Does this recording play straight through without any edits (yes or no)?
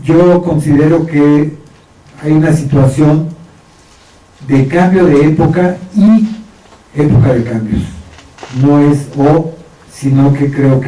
yes